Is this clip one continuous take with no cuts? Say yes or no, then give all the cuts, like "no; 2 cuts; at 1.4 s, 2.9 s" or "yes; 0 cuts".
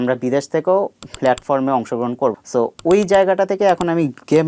no; 1 cut; at 2.4 s